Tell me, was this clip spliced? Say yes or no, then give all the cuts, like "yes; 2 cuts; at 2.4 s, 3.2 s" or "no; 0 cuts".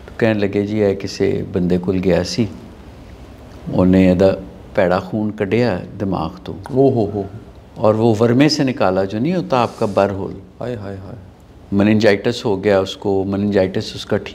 no; 0 cuts